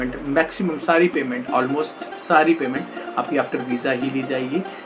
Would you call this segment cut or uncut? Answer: uncut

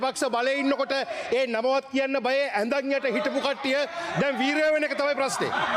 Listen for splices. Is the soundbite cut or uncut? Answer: uncut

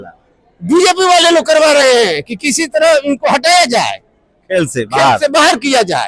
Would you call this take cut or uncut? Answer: uncut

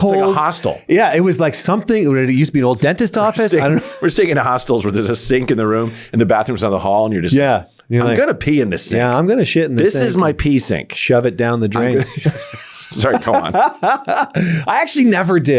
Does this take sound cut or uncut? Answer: uncut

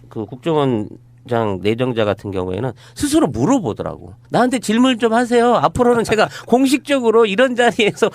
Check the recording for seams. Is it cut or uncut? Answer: cut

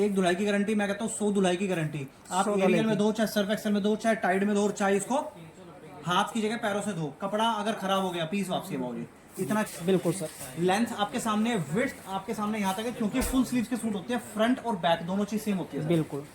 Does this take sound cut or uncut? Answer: cut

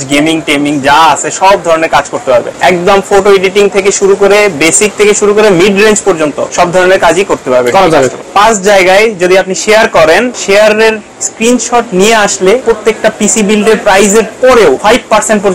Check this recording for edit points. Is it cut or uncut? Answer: cut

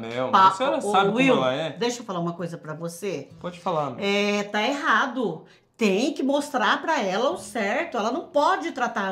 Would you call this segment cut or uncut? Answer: uncut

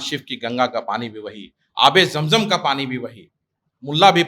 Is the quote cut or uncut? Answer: uncut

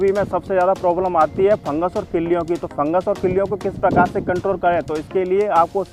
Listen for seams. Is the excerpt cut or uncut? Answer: uncut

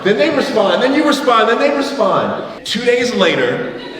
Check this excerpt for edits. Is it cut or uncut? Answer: cut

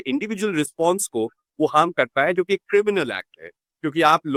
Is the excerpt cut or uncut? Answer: uncut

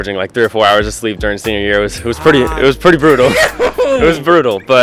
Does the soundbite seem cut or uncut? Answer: uncut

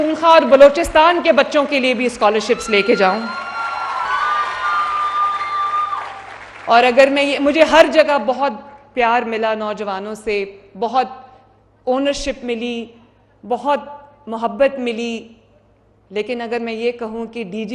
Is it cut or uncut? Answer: cut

